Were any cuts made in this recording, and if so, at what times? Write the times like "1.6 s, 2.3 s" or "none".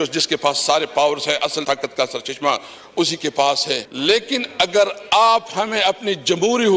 1.6 s, 3.9 s